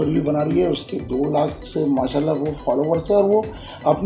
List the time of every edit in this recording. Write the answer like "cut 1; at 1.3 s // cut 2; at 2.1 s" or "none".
none